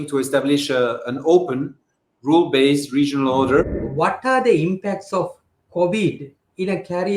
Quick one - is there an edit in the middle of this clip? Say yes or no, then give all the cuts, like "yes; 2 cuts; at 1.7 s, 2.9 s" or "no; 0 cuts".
yes; 1 cut; at 3.6 s